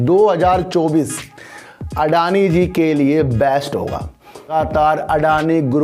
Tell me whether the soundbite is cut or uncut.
cut